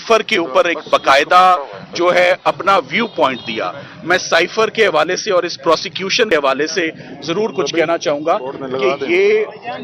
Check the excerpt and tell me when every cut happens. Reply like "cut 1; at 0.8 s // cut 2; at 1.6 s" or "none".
cut 1; at 6.3 s